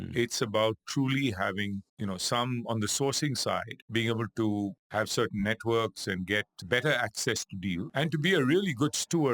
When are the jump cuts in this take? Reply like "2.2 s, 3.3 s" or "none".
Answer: 1.9 s, 3.8 s, 4.8 s, 6.5 s, 7.9 s